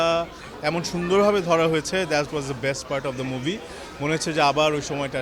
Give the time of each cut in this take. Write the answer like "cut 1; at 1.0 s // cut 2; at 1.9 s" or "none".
none